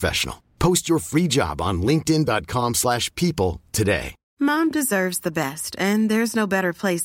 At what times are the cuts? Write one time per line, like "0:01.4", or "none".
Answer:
0:04.2